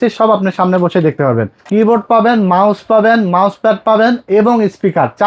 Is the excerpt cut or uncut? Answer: cut